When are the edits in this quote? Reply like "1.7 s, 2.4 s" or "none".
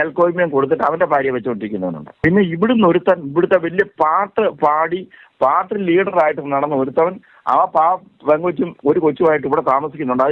none